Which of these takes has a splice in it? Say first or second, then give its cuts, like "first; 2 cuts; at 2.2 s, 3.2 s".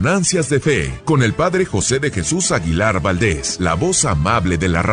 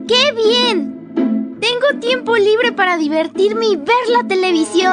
first; 2 cuts; at 0.9 s, 3.5 s